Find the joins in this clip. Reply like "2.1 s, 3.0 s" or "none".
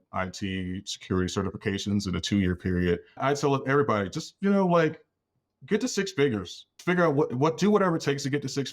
3.2 s, 6.7 s